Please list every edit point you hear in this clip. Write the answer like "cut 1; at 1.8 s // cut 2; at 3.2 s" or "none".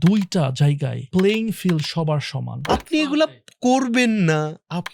cut 1; at 0.9 s // cut 2; at 2.7 s